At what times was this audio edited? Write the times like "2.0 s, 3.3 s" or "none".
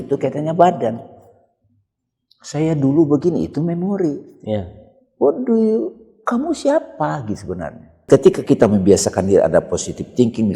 8.0 s